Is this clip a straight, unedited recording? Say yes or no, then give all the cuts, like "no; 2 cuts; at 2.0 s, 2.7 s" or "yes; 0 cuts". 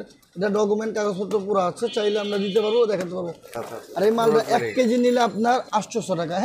no; 1 cut; at 3.6 s